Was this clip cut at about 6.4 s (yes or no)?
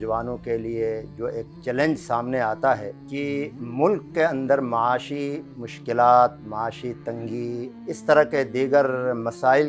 no